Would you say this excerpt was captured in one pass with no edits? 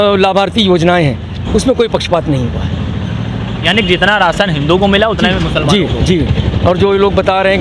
yes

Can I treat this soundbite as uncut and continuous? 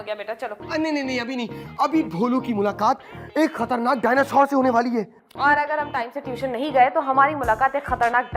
yes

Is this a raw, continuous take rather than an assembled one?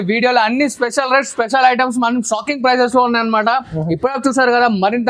yes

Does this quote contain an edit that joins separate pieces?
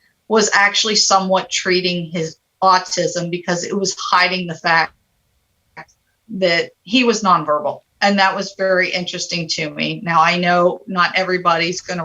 yes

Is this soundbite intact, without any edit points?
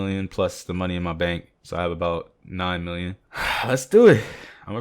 no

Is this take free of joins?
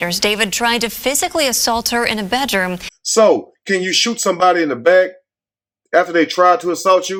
yes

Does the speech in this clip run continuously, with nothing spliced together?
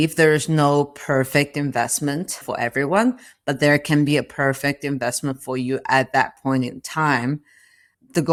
yes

